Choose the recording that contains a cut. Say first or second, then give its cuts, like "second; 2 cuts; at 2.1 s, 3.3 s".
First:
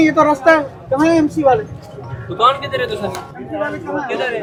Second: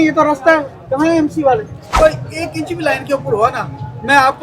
second; 1 cut; at 1.8 s